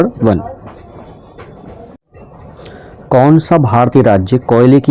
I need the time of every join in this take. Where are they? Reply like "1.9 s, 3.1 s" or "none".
2.0 s